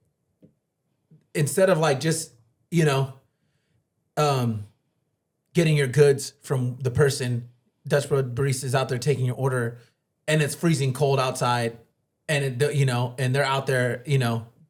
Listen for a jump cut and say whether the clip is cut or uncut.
uncut